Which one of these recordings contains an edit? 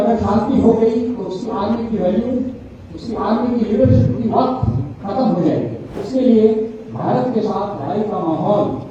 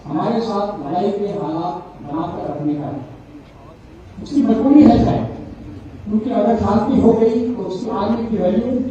first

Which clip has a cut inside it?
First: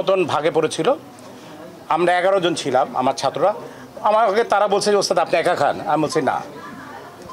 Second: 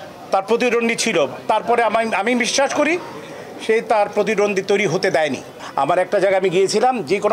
second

